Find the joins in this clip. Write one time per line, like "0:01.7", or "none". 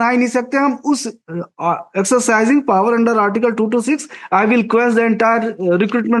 none